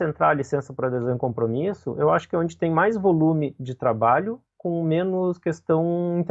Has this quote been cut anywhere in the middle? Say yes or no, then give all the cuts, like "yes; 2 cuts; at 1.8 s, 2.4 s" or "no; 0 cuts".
no; 0 cuts